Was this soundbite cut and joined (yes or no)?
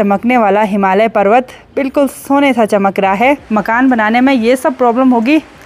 yes